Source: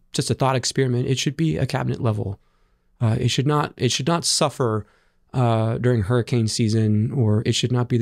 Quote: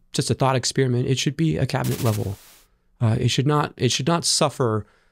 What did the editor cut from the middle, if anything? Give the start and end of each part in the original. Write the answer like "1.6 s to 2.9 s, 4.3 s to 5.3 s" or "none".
none